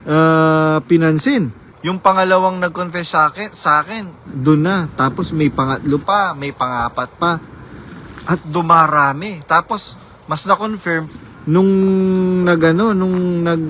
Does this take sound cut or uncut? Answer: cut